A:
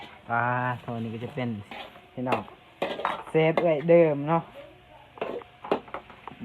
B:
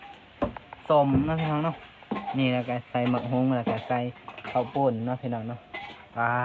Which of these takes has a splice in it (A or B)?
A